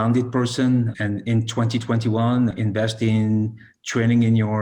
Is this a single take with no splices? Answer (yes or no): no